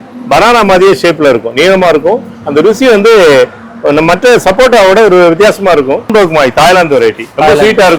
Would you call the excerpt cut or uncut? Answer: cut